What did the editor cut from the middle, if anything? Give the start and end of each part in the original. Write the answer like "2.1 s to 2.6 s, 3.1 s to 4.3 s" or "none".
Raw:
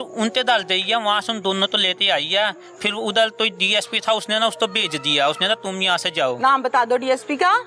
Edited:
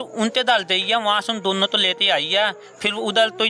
none